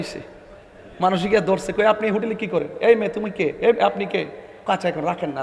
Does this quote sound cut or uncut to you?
uncut